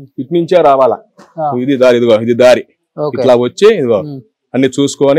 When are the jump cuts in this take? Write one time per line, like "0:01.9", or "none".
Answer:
none